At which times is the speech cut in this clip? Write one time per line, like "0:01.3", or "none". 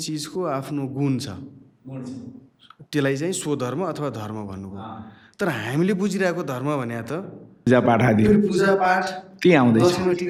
none